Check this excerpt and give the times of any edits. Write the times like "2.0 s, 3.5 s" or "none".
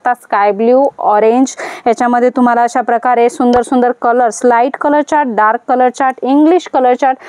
none

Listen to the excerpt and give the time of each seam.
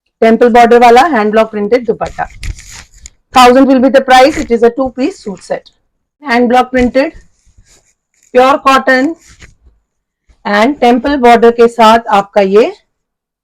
6.3 s

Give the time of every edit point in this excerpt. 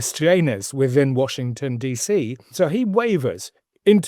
2.5 s

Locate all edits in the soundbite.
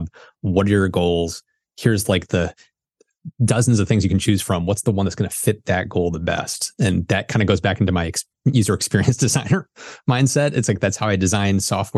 none

